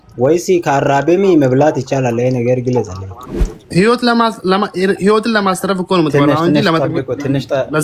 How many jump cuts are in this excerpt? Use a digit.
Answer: 0